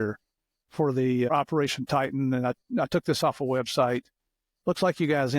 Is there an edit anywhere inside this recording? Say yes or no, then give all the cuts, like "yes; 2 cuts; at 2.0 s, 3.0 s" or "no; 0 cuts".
yes; 1 cut; at 1.3 s